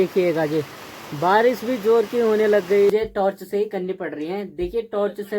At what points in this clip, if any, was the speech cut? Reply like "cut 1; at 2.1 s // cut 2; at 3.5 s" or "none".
cut 1; at 2.9 s

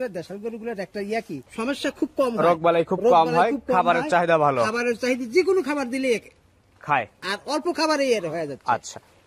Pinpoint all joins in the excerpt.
cut 1; at 1.5 s

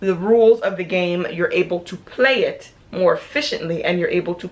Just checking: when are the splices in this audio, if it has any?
none

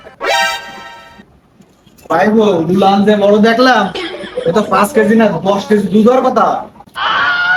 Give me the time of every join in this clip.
none

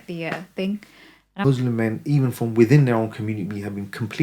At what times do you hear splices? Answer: cut 1; at 1.4 s

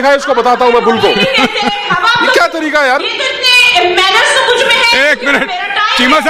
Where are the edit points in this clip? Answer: none

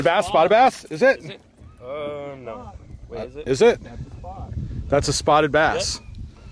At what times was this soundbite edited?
none

